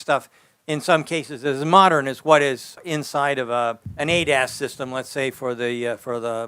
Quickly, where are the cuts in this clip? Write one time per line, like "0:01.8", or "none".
0:02.8
0:03.9